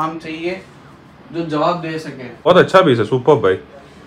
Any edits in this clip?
yes; 1 cut; at 2.5 s

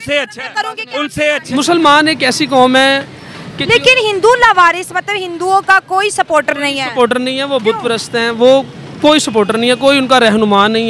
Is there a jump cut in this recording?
yes; 1 cut; at 1.4 s

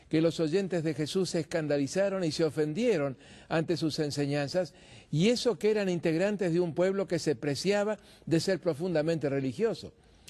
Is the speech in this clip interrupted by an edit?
yes; 1 cut; at 9.0 s

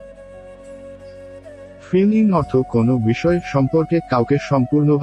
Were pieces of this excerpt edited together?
yes; 1 cut; at 1.9 s

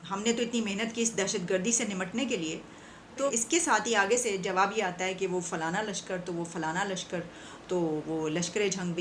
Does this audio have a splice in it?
no; 0 cuts

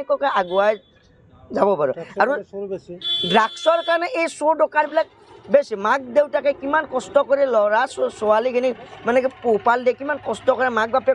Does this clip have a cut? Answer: no; 0 cuts

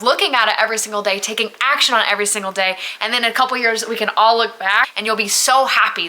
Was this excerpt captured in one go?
no; 1 cut; at 4.9 s

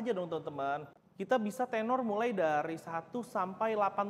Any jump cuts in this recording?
yes; 1 cut; at 0.9 s

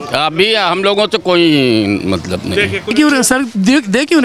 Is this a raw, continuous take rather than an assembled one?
no; 1 cut; at 2.9 s

